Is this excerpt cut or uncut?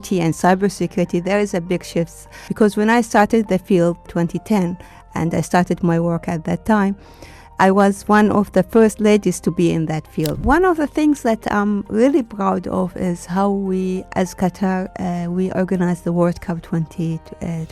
cut